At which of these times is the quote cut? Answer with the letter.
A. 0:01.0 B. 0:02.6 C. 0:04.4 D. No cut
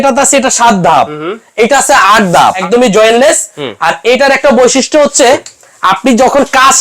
B